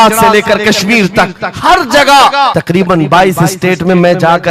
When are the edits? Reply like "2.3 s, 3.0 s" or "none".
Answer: 2.6 s